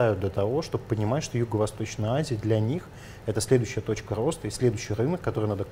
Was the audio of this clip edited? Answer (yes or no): no